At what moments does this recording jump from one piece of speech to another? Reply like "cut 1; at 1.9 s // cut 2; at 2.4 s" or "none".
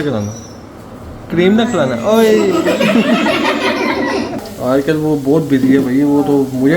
cut 1; at 4.4 s